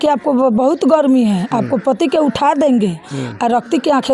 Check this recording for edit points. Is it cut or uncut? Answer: uncut